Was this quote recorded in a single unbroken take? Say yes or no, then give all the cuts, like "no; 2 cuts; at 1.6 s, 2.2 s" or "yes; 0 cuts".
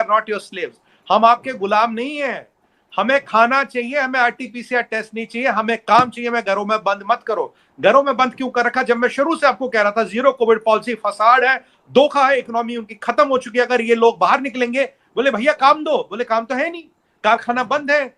yes; 0 cuts